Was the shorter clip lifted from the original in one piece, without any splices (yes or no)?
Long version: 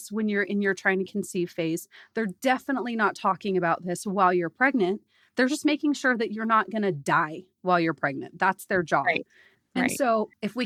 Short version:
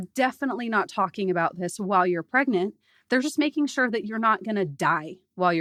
yes